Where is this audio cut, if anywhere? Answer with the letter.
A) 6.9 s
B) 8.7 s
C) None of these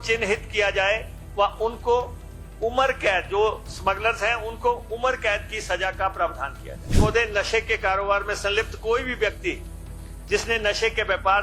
A